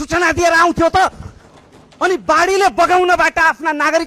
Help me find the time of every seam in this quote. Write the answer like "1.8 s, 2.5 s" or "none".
none